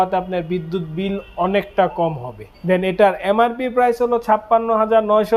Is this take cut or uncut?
uncut